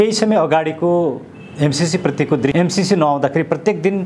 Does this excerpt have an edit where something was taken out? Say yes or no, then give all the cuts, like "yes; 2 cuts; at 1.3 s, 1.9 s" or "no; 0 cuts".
yes; 1 cut; at 2.5 s